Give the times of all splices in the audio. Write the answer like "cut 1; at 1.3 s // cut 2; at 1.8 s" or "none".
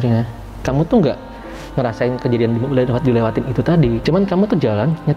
cut 1; at 4.0 s